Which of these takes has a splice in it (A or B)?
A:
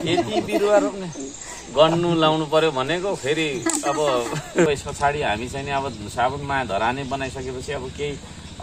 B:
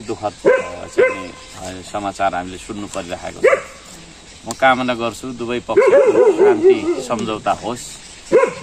A